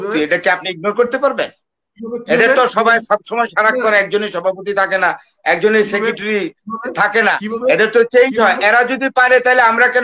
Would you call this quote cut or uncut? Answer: uncut